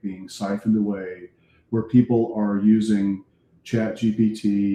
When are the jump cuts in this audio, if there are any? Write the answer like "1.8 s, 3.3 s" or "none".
none